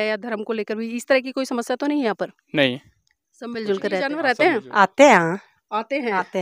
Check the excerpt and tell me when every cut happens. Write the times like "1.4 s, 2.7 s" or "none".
4.2 s